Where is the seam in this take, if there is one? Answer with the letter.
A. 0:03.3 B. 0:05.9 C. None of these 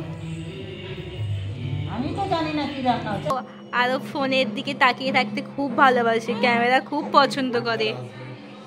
A